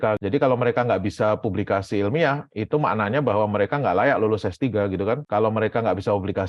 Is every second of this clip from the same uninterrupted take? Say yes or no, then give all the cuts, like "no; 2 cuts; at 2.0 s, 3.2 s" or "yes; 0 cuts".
yes; 0 cuts